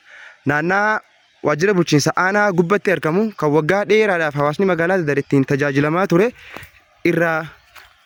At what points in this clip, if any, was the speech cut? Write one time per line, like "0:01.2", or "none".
none